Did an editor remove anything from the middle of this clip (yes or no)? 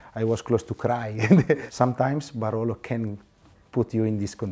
yes